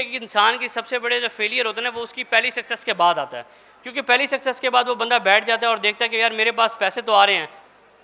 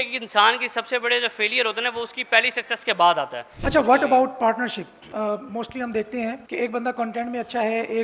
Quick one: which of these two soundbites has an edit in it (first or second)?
second